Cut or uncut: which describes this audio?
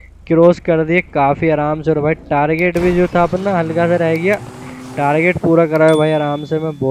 uncut